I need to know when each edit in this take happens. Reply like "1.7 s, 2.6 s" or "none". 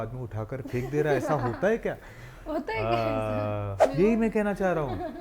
3.8 s